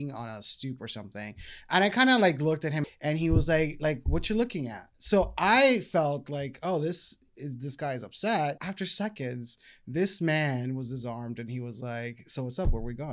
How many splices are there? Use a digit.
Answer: 2